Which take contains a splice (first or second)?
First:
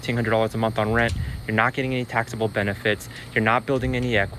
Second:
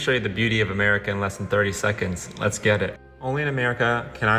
second